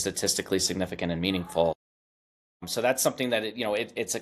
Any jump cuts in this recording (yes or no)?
no